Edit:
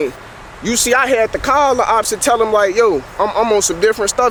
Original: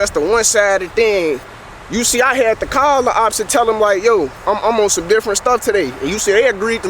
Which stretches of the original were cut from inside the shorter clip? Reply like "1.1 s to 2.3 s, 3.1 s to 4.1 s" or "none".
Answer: none